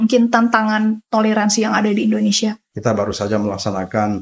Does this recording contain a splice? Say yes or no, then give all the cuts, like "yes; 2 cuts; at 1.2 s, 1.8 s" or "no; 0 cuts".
yes; 1 cut; at 2.7 s